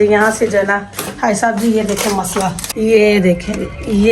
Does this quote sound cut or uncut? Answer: cut